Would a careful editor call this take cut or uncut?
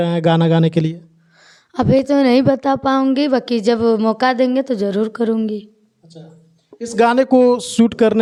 uncut